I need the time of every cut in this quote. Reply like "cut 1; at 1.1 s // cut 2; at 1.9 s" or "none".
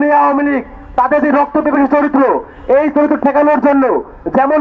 none